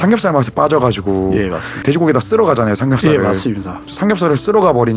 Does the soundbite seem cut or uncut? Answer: cut